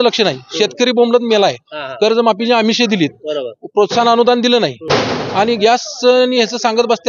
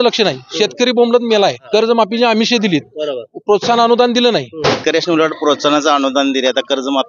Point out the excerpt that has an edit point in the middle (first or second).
second